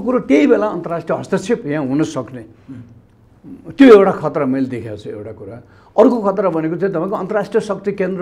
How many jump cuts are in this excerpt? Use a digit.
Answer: 0